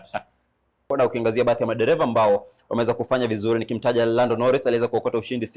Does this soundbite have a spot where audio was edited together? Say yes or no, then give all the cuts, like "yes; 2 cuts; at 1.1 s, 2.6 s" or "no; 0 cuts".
yes; 1 cut; at 0.9 s